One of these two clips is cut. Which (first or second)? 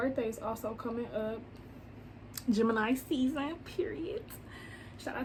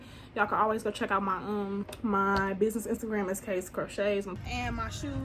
second